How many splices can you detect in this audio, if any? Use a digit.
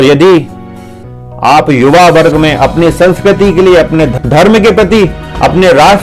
1